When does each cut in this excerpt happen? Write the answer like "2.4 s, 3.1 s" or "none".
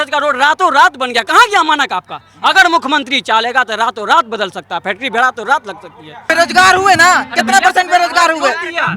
6.2 s